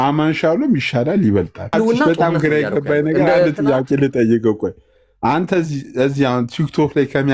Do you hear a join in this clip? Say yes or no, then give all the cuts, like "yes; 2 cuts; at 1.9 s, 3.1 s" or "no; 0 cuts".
yes; 1 cut; at 1.7 s